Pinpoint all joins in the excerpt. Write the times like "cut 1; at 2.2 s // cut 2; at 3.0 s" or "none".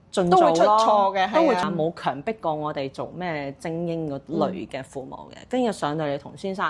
cut 1; at 1.6 s